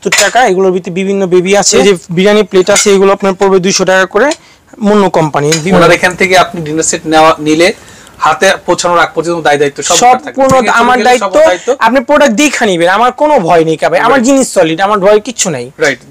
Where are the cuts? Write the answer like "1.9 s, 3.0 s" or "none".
1.8 s, 5.6 s